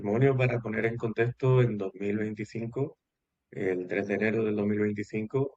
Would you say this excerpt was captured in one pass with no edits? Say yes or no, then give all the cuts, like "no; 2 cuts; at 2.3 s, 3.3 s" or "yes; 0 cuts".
yes; 0 cuts